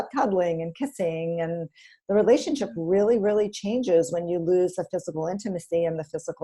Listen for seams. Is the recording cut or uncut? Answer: uncut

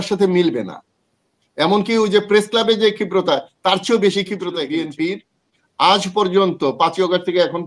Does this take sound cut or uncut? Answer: cut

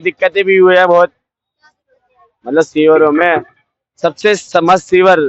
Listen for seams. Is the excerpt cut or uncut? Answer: uncut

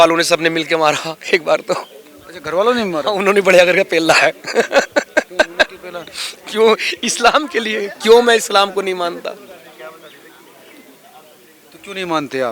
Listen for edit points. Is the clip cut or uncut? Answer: uncut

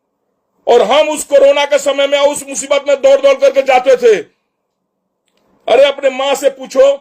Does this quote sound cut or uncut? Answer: uncut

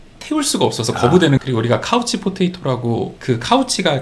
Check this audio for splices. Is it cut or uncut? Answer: cut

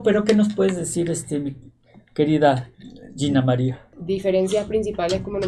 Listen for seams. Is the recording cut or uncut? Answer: cut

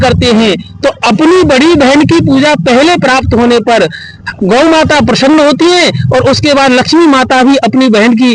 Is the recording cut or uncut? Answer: uncut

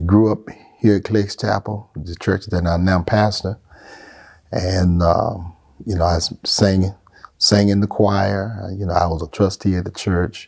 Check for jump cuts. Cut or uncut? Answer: uncut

